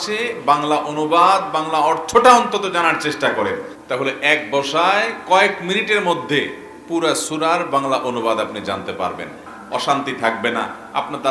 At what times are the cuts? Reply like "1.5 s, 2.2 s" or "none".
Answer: 3.7 s, 9.5 s